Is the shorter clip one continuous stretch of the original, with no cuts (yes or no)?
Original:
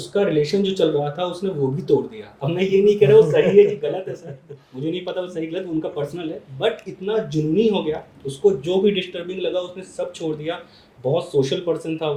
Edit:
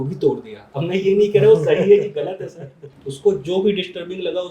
no